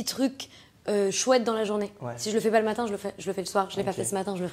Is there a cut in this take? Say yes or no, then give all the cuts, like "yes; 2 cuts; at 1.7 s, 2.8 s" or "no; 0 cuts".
no; 0 cuts